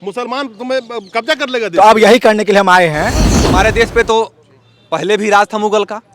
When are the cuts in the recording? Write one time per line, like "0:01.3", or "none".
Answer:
0:03.4